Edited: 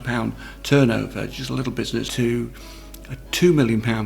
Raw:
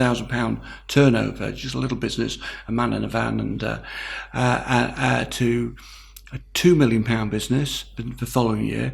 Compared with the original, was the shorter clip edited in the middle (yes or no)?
yes